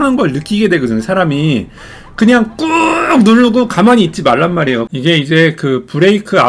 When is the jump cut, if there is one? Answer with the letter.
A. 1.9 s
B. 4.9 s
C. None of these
B